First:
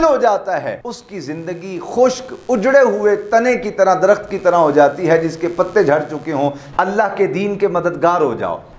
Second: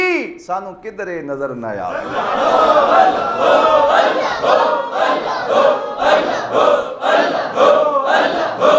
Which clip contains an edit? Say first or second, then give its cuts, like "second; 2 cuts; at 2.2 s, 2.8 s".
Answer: first; 2 cuts; at 0.9 s, 6.6 s